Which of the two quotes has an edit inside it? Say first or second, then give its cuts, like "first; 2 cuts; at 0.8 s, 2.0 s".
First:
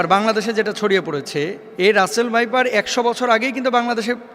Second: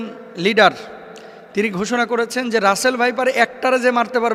first; 1 cut; at 1.6 s